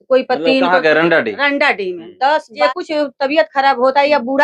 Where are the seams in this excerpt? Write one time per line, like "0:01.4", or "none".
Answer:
0:02.6